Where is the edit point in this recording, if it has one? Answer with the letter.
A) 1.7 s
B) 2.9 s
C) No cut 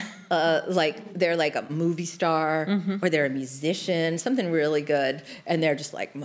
A